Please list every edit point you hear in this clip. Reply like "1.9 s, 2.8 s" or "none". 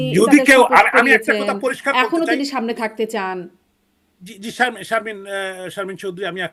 none